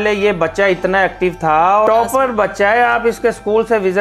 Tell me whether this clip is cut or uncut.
cut